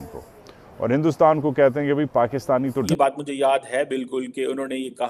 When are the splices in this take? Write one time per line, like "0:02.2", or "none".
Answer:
0:02.9